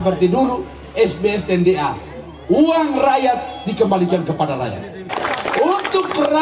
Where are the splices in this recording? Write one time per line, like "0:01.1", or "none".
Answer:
0:05.1